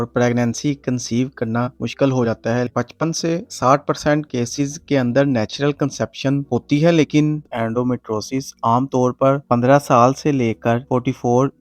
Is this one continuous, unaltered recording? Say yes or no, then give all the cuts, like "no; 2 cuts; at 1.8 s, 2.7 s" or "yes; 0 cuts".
no; 2 cuts; at 2.7 s, 7.4 s